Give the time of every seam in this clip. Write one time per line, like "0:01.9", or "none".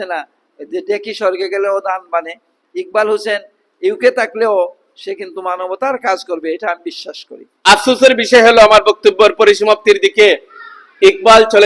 0:07.5

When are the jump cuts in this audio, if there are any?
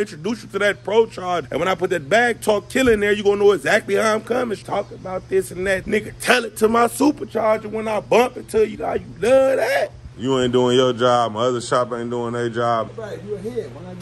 0:01.5
0:04.6
0:05.8
0:08.8
0:10.1
0:12.9

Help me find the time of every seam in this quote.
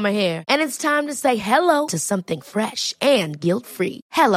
none

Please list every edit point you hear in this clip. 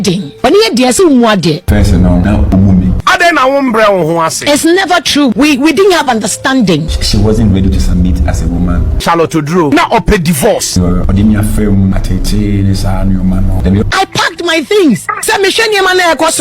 0:13.8

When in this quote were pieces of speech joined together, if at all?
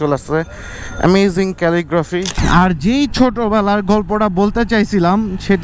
0:02.4

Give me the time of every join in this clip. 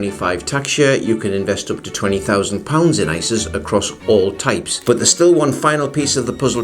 0:04.7

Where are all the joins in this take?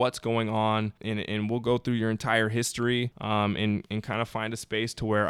0:01.0
0:03.2

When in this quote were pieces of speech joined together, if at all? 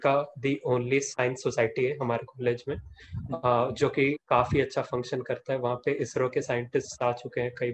none

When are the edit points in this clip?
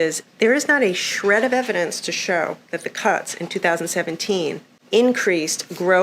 0:04.7

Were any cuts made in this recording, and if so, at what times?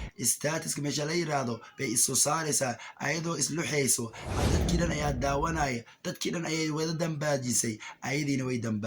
0:04.5

